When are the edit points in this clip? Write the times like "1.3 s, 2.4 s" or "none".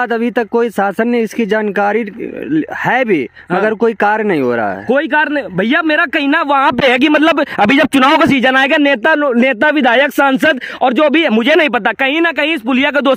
none